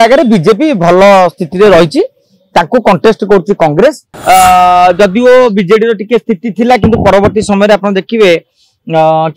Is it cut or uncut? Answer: cut